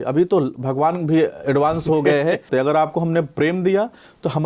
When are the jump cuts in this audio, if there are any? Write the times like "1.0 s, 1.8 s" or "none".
2.5 s